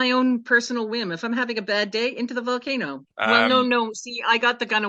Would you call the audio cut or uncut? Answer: cut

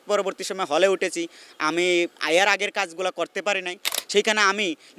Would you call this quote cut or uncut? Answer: cut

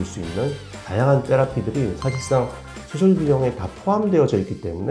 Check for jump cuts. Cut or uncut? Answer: uncut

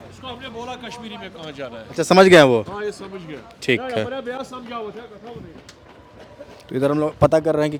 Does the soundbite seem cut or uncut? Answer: uncut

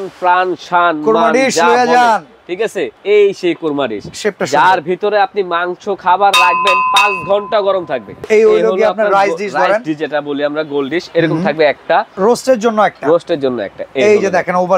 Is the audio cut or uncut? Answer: cut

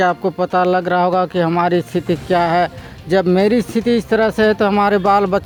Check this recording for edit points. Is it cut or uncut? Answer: uncut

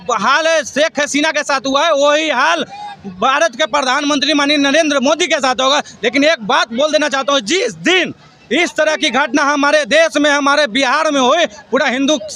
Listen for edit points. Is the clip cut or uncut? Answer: uncut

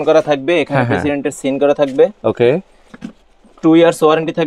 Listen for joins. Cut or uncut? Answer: uncut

